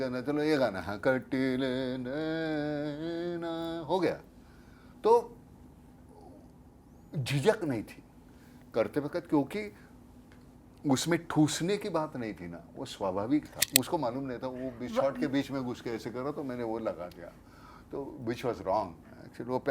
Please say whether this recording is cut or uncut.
cut